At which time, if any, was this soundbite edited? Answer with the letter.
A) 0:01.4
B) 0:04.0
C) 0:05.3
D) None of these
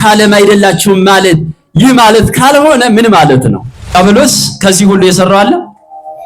B